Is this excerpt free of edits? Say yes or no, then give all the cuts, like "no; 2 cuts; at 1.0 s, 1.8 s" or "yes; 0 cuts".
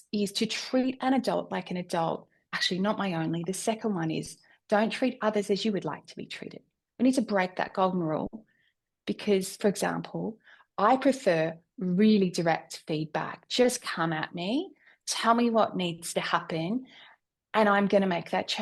yes; 0 cuts